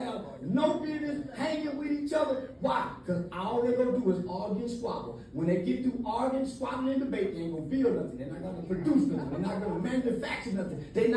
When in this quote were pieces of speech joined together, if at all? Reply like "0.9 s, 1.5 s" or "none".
none